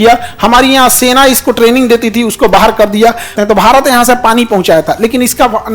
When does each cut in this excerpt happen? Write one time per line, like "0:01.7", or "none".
0:03.3